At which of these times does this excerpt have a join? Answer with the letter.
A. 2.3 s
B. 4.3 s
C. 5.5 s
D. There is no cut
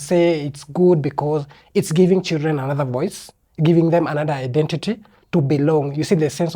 D